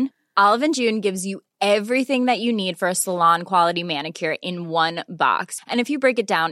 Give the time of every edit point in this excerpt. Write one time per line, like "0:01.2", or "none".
none